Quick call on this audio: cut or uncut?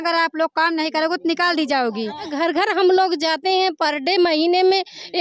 cut